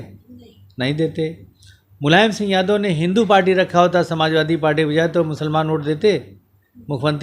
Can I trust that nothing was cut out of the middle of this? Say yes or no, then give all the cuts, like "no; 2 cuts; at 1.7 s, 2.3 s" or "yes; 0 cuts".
yes; 0 cuts